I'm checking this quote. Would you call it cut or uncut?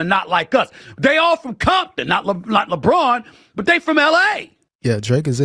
uncut